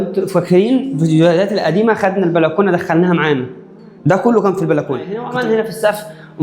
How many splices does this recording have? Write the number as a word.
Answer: one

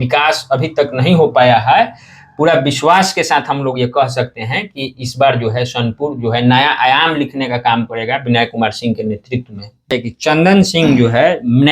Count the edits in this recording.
one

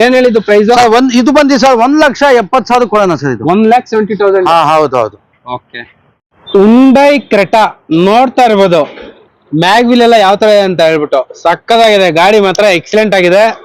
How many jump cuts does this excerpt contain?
zero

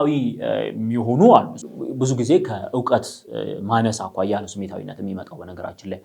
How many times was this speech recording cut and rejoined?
one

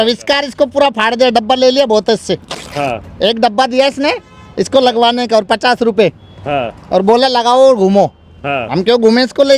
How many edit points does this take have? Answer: zero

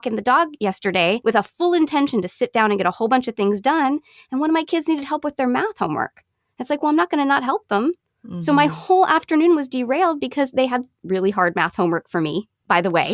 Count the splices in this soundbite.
one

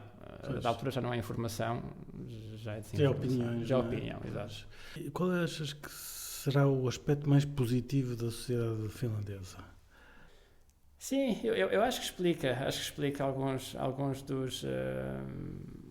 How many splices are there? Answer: two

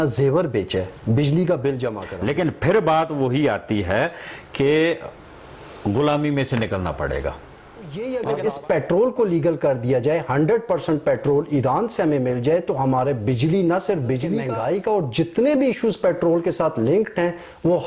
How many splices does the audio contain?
three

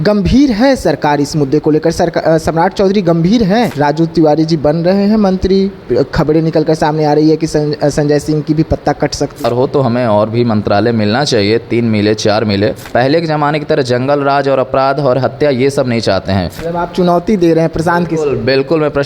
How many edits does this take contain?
four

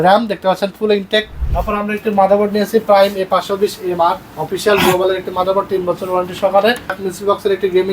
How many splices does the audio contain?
two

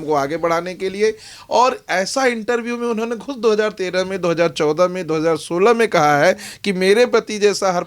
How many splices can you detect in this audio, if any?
zero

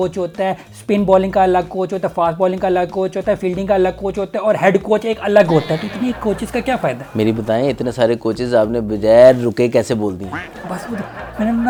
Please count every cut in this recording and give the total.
zero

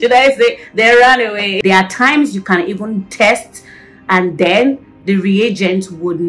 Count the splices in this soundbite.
one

